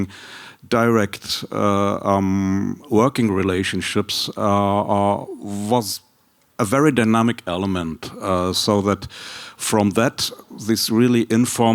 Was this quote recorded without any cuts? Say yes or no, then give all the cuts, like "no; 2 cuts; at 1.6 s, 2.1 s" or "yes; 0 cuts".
yes; 0 cuts